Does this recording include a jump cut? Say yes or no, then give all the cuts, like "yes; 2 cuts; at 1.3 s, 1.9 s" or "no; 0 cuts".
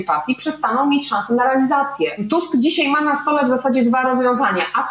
yes; 1 cut; at 2.2 s